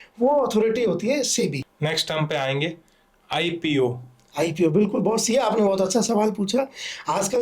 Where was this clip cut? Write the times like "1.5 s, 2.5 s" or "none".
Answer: 1.7 s